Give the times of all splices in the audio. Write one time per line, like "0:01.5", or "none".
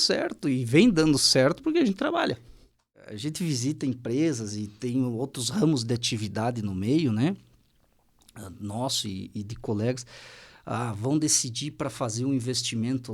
0:03.1